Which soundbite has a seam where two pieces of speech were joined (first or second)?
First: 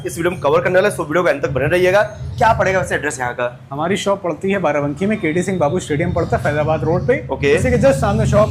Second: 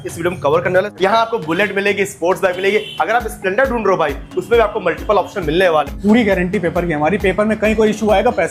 second